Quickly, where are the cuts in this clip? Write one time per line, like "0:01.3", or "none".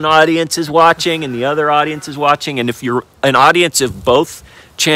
none